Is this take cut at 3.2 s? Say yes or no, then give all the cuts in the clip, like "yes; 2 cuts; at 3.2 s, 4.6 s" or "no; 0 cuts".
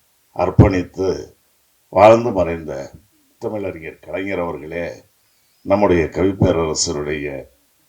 yes; 1 cut; at 3.2 s